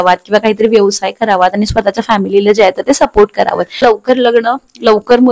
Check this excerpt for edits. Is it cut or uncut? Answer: cut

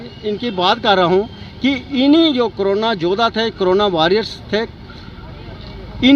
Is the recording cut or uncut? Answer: uncut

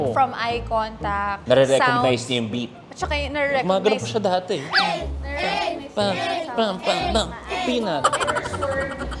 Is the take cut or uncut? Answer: cut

